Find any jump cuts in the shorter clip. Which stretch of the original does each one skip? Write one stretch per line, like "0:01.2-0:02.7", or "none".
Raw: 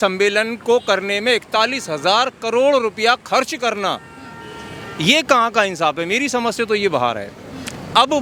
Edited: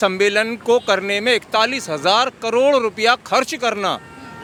none